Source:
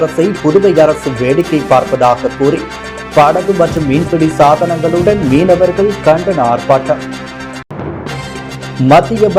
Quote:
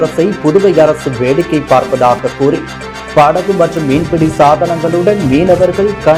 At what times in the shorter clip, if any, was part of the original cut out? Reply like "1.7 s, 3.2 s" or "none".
none